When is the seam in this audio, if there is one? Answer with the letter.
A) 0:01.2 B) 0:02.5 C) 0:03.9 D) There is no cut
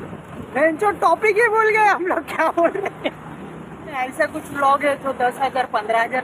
C